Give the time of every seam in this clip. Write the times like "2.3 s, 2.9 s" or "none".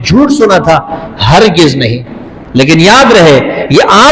2.7 s